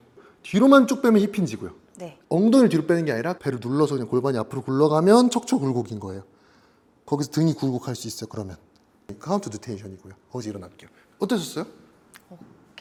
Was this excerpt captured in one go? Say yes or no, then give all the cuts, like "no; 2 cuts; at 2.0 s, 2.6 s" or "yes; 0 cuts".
yes; 0 cuts